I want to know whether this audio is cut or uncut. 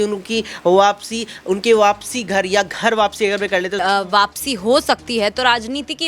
cut